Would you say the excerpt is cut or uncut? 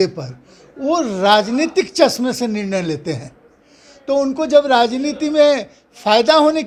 uncut